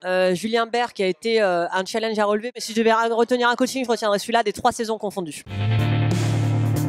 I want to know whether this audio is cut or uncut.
cut